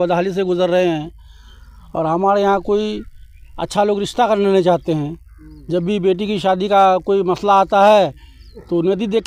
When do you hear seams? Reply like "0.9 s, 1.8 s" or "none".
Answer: none